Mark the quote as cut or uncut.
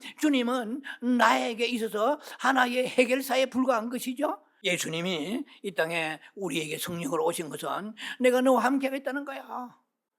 cut